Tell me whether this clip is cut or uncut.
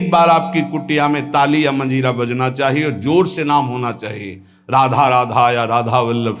uncut